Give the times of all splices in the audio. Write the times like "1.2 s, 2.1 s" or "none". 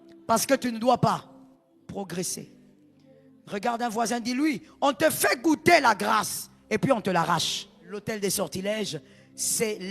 7.9 s